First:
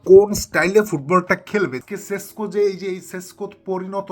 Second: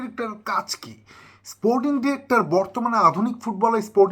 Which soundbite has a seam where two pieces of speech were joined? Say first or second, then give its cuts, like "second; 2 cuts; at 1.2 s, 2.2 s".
first; 1 cut; at 1.8 s